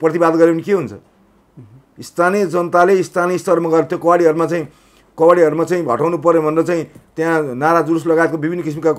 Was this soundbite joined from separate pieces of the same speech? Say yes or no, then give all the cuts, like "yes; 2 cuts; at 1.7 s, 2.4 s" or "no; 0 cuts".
no; 0 cuts